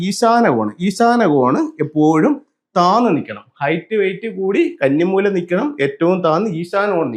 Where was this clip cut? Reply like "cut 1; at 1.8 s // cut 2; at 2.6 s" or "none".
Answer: none